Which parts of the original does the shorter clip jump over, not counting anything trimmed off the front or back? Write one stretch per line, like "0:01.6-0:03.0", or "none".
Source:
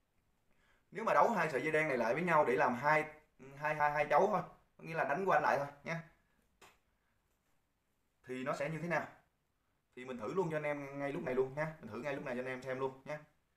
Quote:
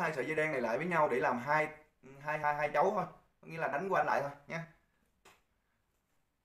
none